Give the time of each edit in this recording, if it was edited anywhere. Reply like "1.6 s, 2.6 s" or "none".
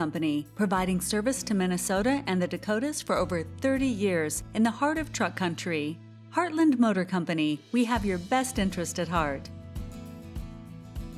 9.4 s